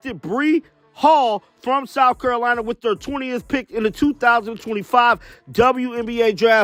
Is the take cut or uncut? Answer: uncut